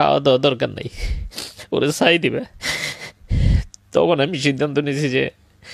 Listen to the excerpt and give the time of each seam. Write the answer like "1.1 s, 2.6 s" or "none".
none